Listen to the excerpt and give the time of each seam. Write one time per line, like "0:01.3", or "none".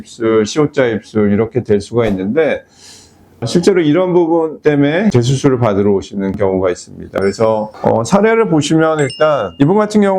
none